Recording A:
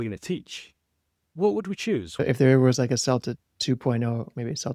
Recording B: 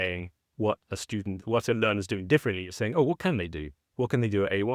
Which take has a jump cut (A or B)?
A